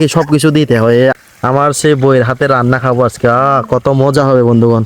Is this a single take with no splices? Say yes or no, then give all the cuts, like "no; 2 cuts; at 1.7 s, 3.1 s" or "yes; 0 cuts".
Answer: no; 1 cut; at 1.3 s